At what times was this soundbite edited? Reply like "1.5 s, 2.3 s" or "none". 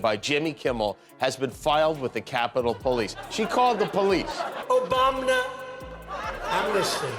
4.5 s